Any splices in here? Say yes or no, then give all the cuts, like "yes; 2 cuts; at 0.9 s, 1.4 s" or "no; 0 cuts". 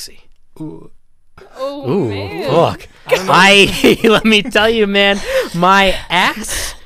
no; 0 cuts